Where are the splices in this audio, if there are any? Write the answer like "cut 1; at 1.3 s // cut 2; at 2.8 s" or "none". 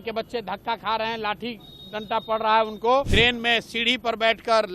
cut 1; at 3.1 s